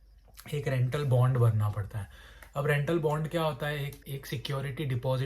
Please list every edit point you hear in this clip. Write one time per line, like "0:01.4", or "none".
0:04.1